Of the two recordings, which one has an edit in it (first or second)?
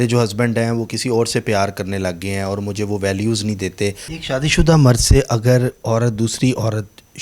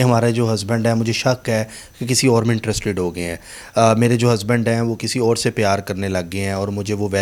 first